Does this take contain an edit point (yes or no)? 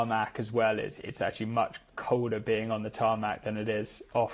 no